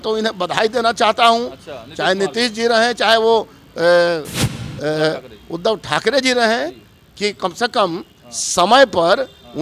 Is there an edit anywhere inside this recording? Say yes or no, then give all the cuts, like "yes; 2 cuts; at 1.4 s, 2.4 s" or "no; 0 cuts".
no; 0 cuts